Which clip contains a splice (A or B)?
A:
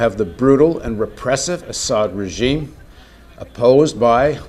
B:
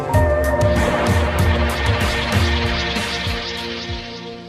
A